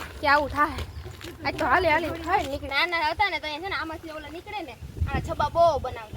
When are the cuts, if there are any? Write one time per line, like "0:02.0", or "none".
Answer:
0:02.7